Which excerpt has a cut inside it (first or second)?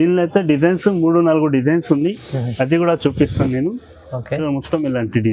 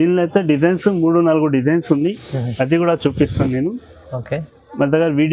first